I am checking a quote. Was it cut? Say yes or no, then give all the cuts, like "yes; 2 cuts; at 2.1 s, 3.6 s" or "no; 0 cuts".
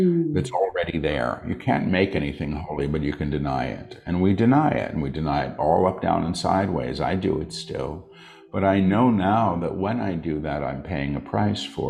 no; 0 cuts